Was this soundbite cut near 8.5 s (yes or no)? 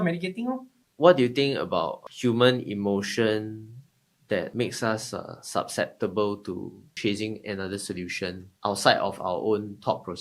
yes